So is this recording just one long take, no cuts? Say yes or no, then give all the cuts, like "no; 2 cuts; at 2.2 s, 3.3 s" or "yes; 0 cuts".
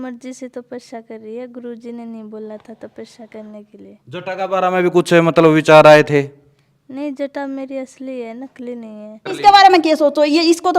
no; 1 cut; at 9.3 s